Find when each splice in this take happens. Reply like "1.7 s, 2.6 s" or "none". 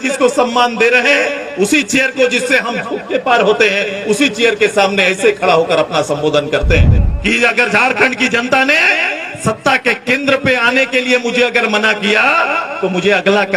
7.0 s